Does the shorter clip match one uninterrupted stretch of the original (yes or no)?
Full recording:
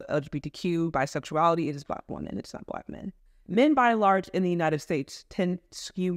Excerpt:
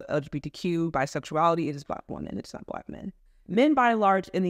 yes